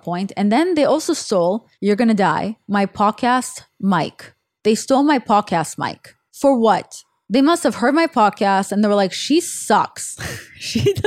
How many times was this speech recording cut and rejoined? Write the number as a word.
two